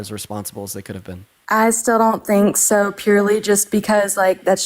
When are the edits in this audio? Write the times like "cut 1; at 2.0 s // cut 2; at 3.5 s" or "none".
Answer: cut 1; at 1.3 s